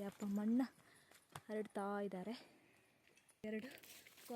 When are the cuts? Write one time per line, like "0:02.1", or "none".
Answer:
0:03.4